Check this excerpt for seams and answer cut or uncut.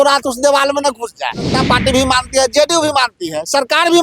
cut